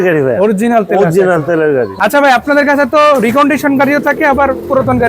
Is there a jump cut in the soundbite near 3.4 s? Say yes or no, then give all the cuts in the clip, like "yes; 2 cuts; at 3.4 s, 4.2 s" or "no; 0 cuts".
no; 1 cut; at 1.9 s